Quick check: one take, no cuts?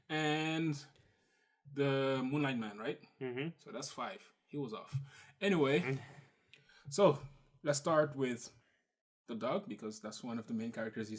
yes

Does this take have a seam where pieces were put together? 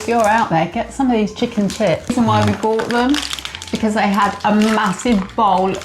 yes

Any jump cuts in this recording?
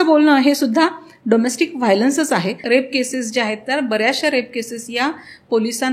yes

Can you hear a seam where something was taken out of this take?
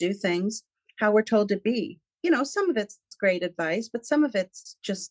yes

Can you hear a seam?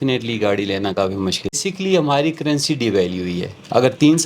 yes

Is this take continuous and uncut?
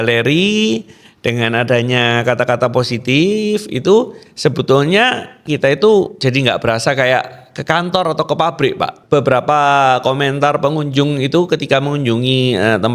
no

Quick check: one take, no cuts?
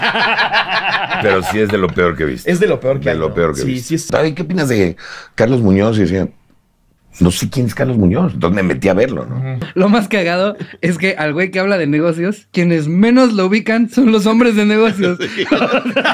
no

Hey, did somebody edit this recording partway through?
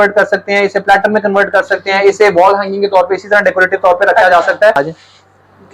yes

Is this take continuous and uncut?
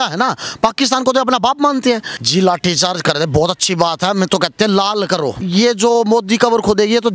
no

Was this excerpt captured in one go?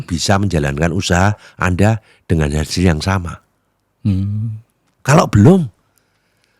yes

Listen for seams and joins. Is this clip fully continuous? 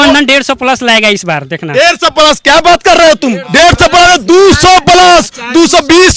yes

